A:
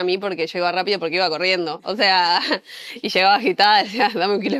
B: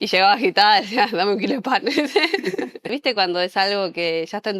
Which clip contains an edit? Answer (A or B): B